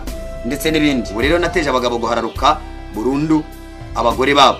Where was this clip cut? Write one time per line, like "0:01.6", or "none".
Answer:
0:01.1